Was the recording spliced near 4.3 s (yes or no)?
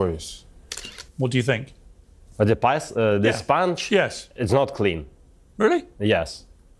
no